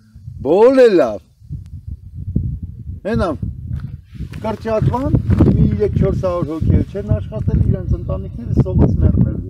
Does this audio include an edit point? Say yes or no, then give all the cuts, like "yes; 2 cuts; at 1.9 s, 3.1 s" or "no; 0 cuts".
no; 0 cuts